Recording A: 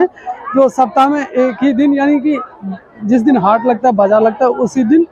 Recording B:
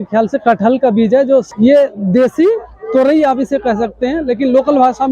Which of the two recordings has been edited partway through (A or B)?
B